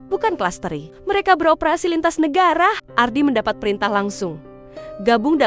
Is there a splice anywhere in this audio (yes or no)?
no